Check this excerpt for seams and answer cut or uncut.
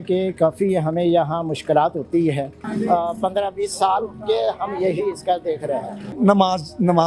cut